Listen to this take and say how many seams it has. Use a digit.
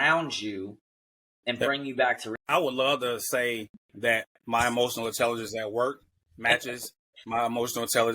1